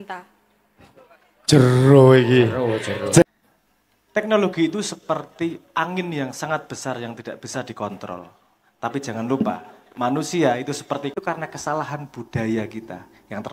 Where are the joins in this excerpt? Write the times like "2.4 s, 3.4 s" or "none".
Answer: 3.2 s, 11.1 s